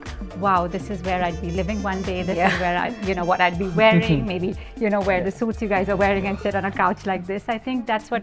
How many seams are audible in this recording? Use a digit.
0